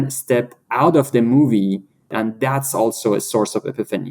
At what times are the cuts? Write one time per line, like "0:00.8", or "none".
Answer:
0:02.2